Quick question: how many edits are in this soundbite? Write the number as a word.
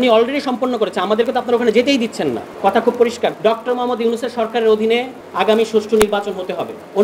three